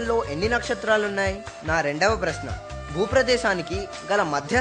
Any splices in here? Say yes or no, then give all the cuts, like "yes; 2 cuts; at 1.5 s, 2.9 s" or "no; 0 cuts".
yes; 1 cut; at 1.5 s